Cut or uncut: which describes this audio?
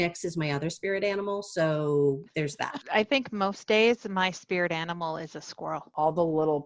cut